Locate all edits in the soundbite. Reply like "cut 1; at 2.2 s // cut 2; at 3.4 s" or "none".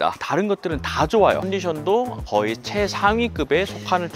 cut 1; at 1.4 s